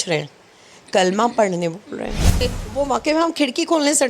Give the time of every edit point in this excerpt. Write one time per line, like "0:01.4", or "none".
0:02.4